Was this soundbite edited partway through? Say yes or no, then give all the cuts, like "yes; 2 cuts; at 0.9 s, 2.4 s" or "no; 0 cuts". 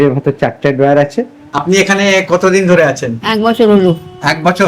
yes; 1 cut; at 1.4 s